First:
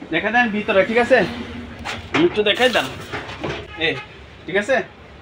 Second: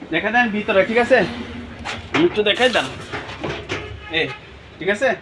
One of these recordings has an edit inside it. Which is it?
first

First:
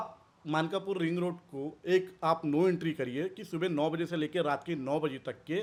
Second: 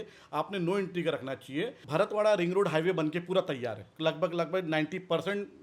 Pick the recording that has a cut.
second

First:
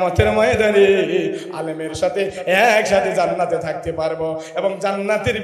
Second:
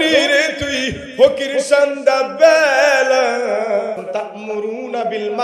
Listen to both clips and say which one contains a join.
second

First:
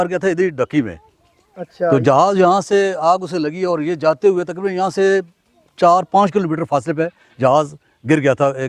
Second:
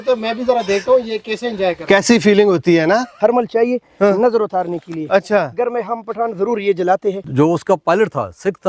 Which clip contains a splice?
second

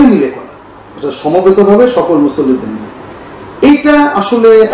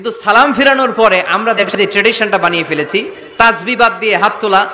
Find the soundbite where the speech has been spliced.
second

